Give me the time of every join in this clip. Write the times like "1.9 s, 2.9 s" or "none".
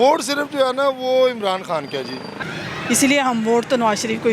2.3 s

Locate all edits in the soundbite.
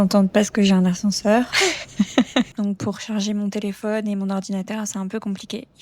1.5 s, 2.5 s

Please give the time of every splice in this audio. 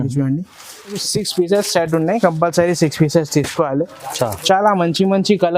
1.0 s

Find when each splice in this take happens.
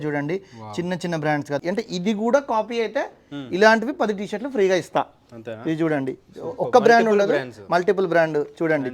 1.6 s

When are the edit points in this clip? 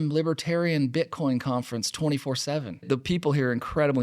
2.8 s

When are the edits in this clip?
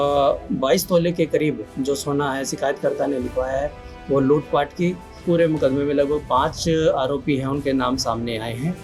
5.1 s

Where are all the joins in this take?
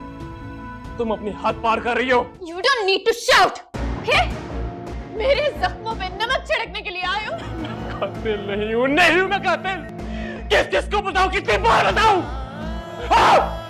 2.4 s, 4.9 s, 7.5 s, 9.9 s

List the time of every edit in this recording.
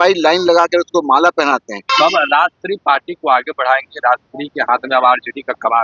1.9 s

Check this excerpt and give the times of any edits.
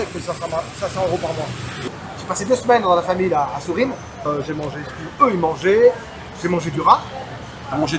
1.9 s, 4.3 s

